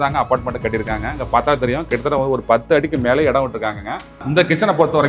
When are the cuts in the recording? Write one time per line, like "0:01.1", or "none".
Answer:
0:04.2